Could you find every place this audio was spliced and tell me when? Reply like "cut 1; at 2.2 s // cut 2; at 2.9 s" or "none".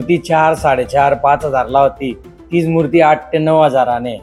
none